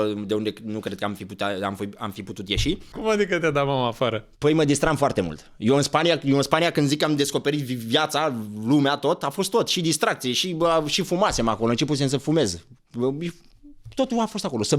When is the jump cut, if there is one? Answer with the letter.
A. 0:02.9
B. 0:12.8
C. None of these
A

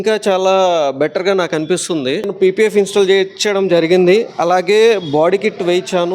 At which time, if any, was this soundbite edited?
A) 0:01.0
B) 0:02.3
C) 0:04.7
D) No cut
B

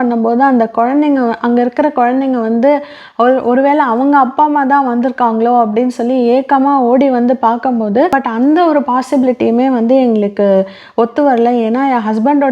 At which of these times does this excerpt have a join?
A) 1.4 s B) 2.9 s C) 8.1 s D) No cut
C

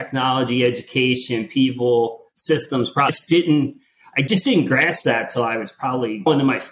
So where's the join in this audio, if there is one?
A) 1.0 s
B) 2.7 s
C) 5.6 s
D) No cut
D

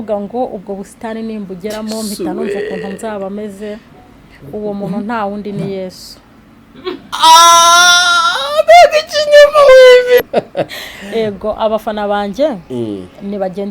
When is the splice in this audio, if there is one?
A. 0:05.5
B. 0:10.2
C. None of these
B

